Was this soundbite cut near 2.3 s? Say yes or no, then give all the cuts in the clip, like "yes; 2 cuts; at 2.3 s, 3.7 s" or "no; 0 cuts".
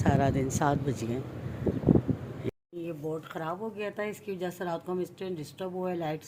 yes; 1 cut; at 2.3 s